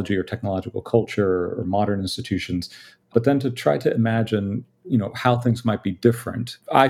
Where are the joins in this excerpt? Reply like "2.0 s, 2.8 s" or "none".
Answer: 3.1 s